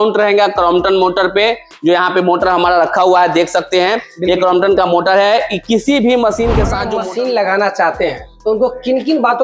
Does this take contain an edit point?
yes; 1 cut; at 6.9 s

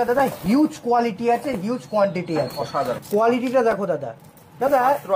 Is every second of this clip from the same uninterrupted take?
no; 1 cut; at 3.0 s

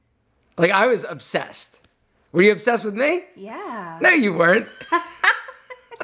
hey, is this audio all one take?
yes; 0 cuts

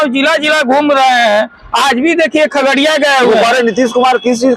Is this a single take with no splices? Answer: yes; 0 cuts

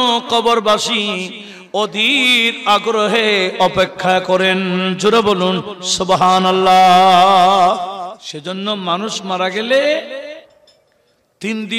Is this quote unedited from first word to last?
no; 1 cut; at 8.3 s

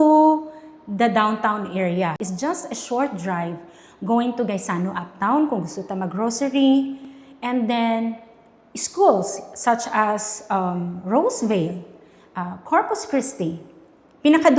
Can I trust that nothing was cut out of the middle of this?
no; 1 cut; at 2.2 s

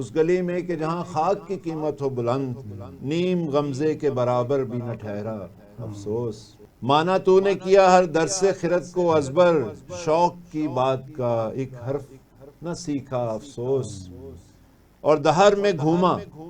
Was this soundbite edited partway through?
no; 0 cuts

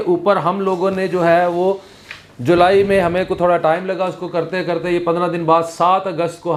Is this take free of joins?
yes; 0 cuts

